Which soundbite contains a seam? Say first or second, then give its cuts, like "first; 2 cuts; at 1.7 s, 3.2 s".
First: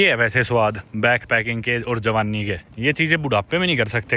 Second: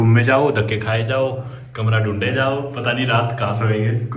first; 1 cut; at 2.7 s